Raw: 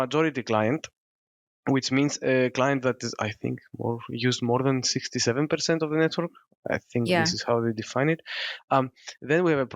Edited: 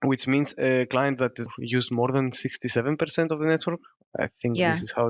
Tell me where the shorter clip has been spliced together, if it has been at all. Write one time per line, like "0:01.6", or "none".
0:01.5